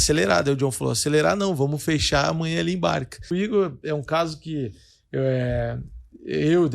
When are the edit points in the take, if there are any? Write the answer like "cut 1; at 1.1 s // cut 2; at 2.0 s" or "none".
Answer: cut 1; at 3.3 s